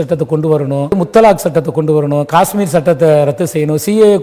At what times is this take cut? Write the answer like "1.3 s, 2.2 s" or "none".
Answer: 0.9 s